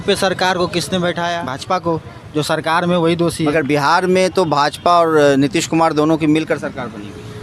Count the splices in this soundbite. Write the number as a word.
one